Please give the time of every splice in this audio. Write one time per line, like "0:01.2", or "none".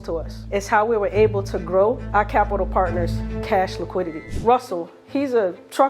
0:02.0